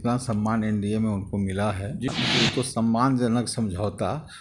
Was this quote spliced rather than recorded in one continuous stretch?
yes; 1 cut; at 2.1 s

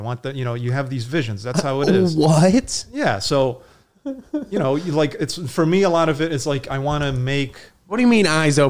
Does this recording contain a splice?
no; 0 cuts

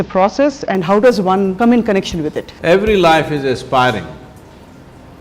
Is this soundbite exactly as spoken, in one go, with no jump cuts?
no; 2 cuts; at 1.5 s, 2.5 s

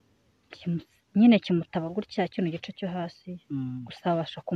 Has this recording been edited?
no; 0 cuts

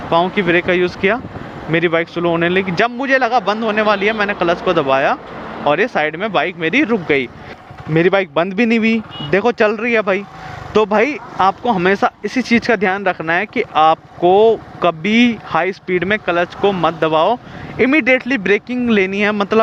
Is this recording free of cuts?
yes; 0 cuts

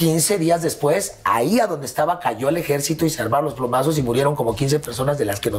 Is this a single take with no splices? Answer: yes; 0 cuts

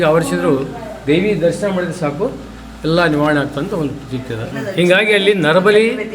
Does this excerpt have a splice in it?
yes; 1 cut; at 4.6 s

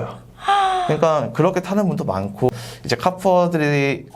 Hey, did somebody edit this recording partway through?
yes; 1 cut; at 2.5 s

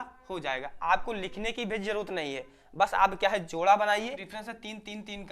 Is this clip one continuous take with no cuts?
no; 1 cut; at 4.3 s

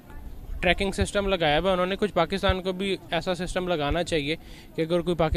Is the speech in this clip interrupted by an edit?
no; 0 cuts

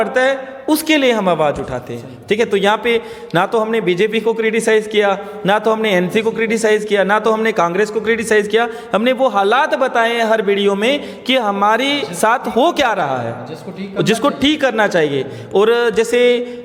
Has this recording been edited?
no; 0 cuts

